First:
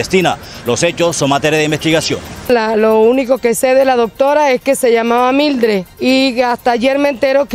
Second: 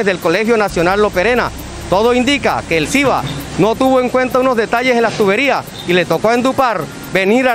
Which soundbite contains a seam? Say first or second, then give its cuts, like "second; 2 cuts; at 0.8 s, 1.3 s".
first; 2 cuts; at 2.5 s, 5.9 s